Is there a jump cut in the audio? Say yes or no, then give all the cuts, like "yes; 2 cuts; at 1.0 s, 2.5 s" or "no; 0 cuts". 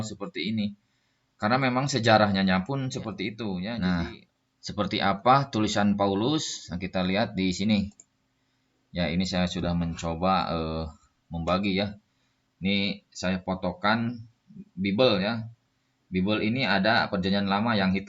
yes; 1 cut; at 3.7 s